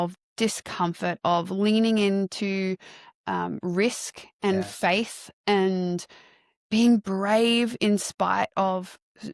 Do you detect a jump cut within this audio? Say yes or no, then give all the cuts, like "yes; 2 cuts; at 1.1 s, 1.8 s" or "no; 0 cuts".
no; 0 cuts